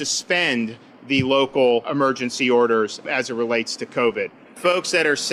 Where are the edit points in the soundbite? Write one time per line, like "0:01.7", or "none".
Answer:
0:00.9
0:01.9
0:03.0
0:04.5